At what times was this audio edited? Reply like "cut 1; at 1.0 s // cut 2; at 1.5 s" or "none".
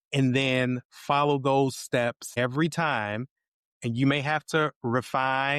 cut 1; at 2.2 s